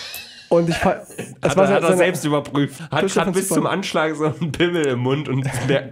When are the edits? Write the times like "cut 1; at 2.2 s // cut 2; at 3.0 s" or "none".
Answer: cut 1; at 2.8 s